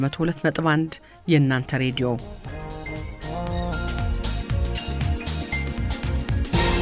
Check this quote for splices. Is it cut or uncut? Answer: cut